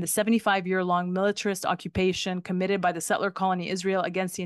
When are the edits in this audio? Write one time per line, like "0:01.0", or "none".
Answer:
none

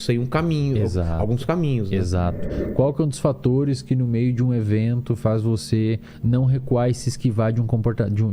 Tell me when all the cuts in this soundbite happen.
0:02.5

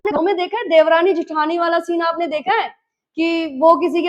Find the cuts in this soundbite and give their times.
none

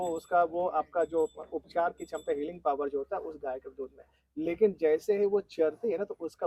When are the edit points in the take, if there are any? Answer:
none

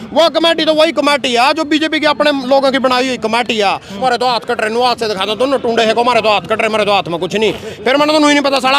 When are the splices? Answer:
0:04.0

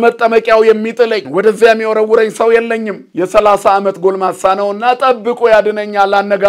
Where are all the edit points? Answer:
0:01.2
0:03.0

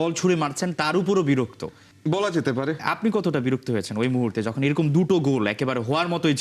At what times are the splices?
none

